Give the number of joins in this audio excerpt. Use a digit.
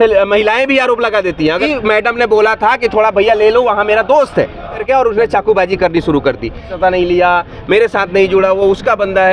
3